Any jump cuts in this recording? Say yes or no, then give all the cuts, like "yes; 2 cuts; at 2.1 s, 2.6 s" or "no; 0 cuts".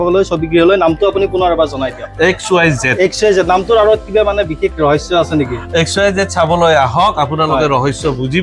no; 0 cuts